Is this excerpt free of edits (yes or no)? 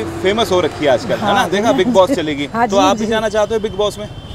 yes